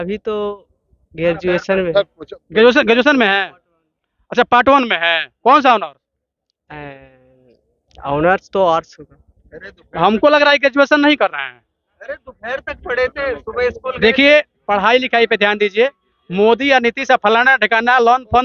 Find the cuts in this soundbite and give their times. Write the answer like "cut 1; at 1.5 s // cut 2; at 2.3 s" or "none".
none